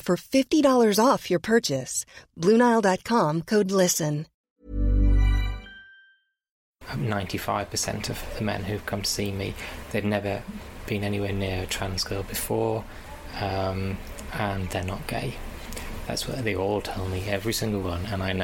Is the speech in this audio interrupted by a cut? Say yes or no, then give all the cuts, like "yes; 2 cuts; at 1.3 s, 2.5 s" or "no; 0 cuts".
yes; 2 cuts; at 4.3 s, 6.6 s